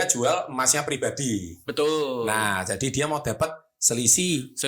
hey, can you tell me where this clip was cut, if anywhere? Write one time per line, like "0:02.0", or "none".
none